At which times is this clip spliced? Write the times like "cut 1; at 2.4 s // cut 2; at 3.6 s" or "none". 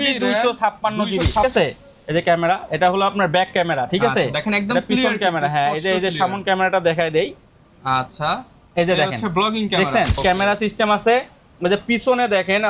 cut 1; at 1.4 s // cut 2; at 10.2 s